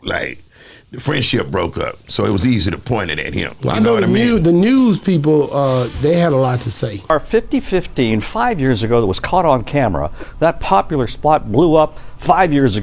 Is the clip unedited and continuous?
yes; 0 cuts

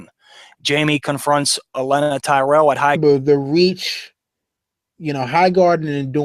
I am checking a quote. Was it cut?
no; 0 cuts

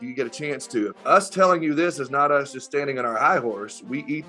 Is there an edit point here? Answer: yes; 1 cut; at 0.9 s

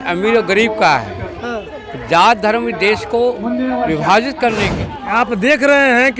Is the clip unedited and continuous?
no; 1 cut; at 4.7 s

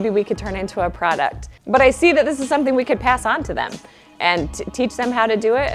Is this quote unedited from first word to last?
yes; 0 cuts

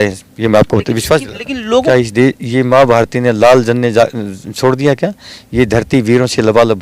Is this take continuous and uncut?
no; 1 cut; at 1.8 s

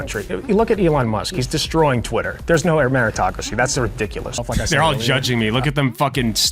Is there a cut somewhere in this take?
yes; 1 cut; at 4.3 s

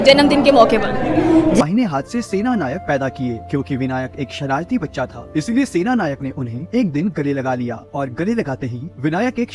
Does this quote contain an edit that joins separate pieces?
yes; 1 cut; at 1.6 s

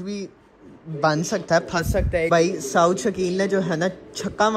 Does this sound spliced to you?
yes; 1 cut; at 2.3 s

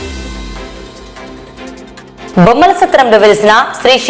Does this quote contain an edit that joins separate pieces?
yes; 1 cut; at 2.3 s

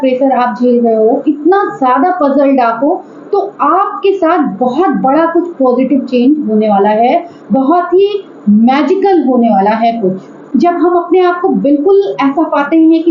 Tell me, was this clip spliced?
yes; 1 cut; at 10.4 s

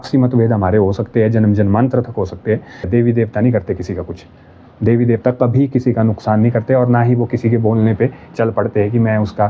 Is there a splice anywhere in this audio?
yes; 1 cut; at 2.9 s

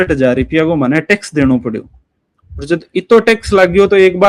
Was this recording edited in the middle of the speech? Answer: no; 0 cuts

